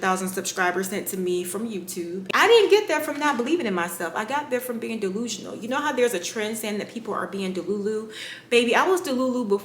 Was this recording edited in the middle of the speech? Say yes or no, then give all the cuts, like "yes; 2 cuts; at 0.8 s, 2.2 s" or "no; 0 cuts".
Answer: yes; 1 cut; at 2.2 s